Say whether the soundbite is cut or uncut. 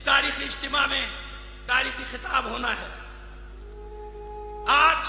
cut